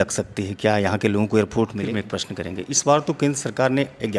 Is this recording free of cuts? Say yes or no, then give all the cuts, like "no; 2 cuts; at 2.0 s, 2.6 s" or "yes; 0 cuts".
no; 1 cut; at 1.8 s